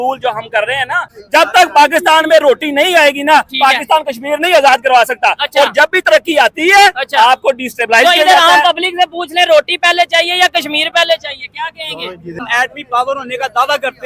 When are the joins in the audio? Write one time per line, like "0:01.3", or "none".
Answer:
0:01.1
0:12.5